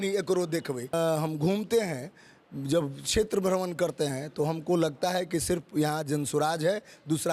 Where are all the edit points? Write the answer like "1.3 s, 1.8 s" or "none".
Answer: 0.9 s